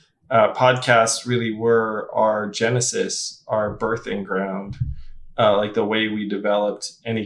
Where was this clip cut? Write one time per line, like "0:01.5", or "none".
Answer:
none